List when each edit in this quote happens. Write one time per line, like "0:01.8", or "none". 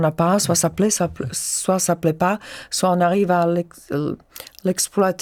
none